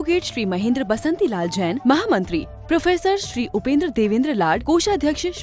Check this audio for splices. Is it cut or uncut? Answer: uncut